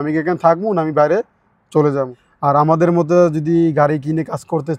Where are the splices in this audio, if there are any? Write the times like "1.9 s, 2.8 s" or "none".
2.2 s